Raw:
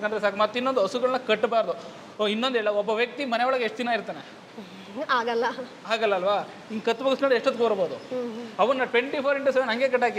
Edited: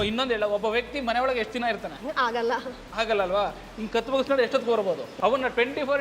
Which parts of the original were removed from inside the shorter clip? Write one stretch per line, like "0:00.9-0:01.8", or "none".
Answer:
0:04.2-0:04.9
0:08.0-0:08.4